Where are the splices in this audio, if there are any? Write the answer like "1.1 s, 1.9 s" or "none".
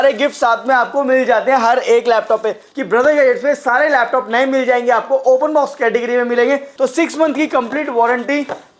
2.7 s, 6.7 s